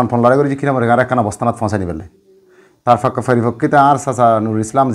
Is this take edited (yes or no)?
no